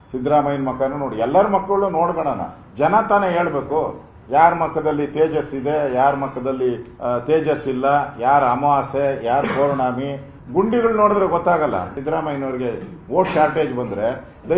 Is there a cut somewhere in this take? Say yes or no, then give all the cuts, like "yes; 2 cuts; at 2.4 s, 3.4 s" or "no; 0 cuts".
yes; 1 cut; at 11.9 s